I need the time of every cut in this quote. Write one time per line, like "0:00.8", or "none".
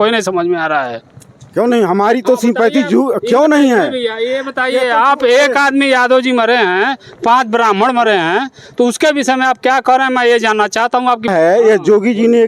0:11.3